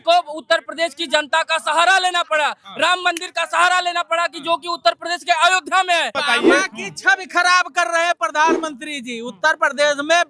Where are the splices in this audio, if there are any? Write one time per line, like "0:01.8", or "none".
0:06.2